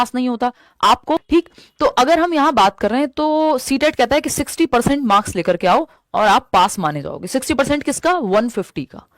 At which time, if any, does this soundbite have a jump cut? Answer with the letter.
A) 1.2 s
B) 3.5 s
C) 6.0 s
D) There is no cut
A